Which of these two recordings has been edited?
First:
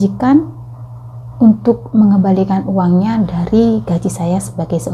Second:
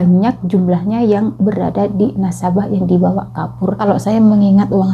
second; 1 cut; at 3.8 s

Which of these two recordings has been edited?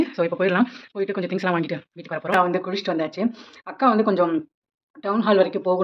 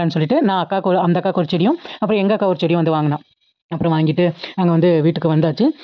first; 1 cut; at 2.3 s

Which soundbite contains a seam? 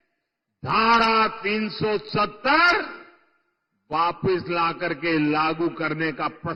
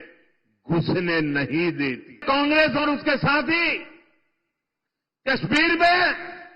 second; 1 cut; at 2.2 s

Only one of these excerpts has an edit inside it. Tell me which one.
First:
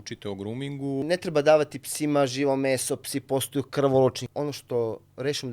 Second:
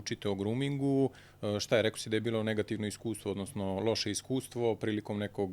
first; 2 cuts; at 1.0 s, 4.2 s

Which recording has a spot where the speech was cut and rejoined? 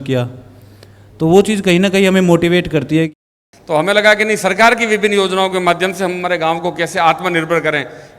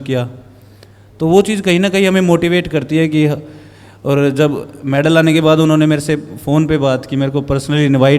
first; 1 cut; at 3.1 s

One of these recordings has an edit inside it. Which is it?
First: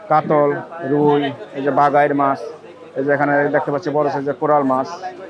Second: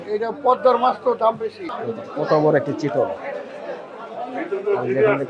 second; 1 cut; at 1.7 s

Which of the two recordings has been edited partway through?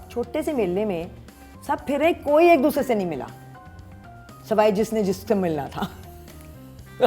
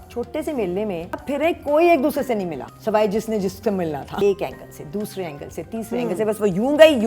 second; 3 cuts; at 1.2 s, 2.7 s, 4.2 s

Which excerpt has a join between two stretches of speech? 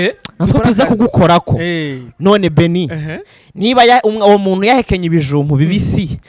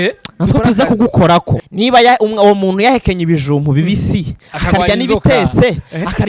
second; 1 cut; at 1.6 s

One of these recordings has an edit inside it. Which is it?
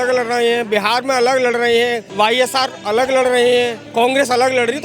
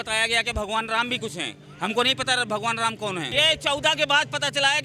first; 2 cuts; at 2.1 s, 3.8 s

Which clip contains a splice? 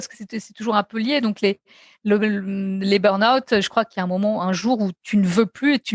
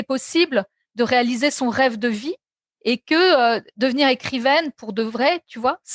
first; 2 cuts; at 3.9 s, 5.0 s

